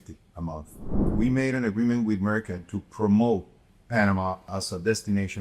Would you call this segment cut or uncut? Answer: cut